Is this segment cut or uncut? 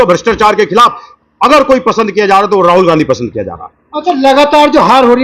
uncut